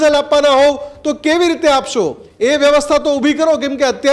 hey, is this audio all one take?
no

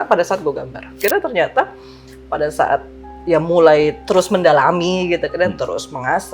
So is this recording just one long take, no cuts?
no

